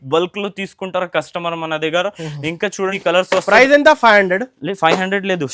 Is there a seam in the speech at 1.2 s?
no; 1 cut; at 3.0 s

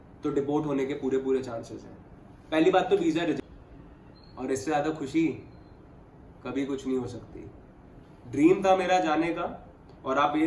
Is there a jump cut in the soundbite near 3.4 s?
yes; 1 cut; at 3.4 s

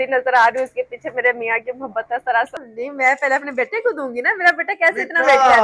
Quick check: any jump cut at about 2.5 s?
yes; 1 cut; at 2.5 s

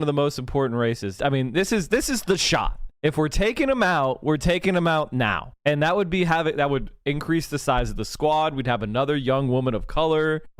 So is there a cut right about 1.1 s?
yes; 1 cut; at 1.1 s

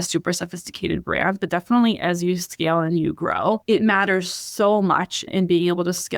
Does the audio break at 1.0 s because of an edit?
no; 2 cuts; at 3.6 s, 5.2 s

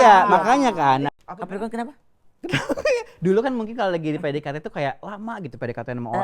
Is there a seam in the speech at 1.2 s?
yes; 1 cut; at 1.2 s

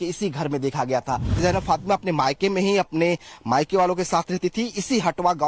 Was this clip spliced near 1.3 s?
yes; 1 cut; at 1.3 s

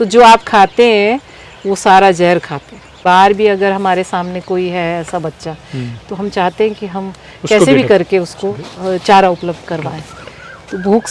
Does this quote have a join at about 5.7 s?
no; 1 cut; at 3.0 s

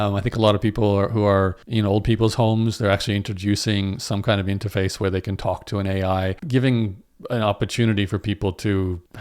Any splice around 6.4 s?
yes; 1 cut; at 6.4 s

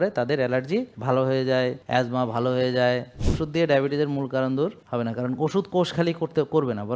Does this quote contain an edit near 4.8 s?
yes; 4 cuts; at 0.9 s, 1.8 s, 3.2 s, 4.8 s

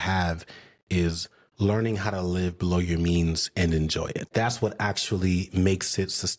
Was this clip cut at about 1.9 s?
no; 1 cut; at 4.3 s

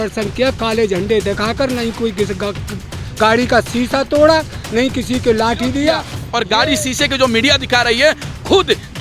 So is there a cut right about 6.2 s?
yes; 1 cut; at 6.2 s

